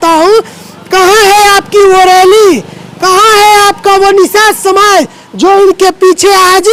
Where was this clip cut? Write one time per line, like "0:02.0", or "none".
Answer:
none